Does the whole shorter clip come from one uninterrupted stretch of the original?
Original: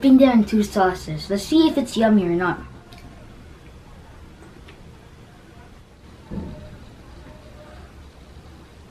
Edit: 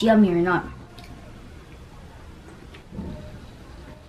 no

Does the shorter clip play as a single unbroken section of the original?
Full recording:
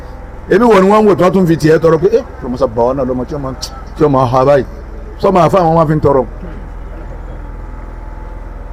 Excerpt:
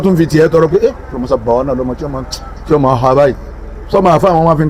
yes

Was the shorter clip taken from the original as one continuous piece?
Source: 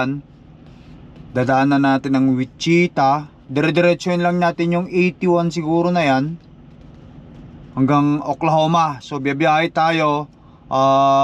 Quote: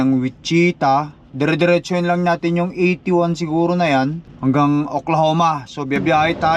no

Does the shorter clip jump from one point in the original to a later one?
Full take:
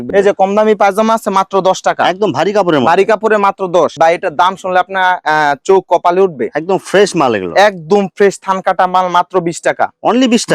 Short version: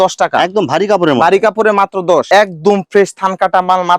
yes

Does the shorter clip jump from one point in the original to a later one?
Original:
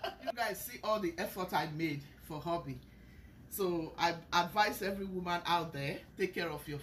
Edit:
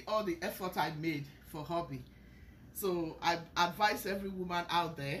no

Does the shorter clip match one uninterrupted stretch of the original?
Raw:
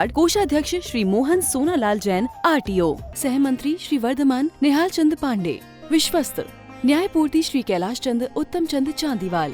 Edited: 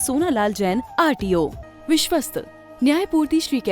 no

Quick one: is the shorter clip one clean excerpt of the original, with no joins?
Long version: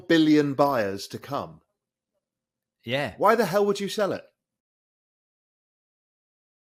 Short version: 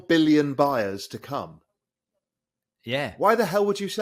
yes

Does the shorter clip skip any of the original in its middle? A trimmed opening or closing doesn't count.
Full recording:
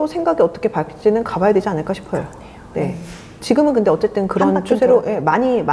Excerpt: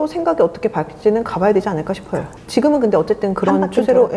yes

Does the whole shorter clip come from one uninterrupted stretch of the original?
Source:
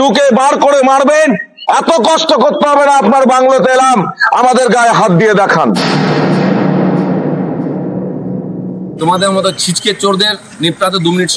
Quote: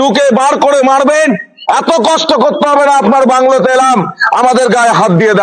yes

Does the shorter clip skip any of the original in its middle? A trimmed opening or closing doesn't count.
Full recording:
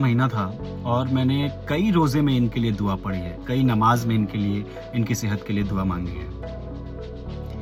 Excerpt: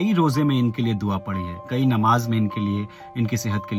no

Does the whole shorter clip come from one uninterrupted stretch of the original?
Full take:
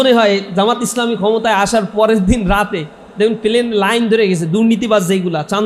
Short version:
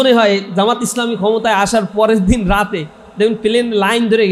yes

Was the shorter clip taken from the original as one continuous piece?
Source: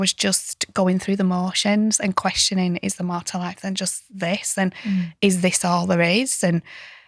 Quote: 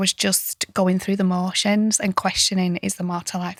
yes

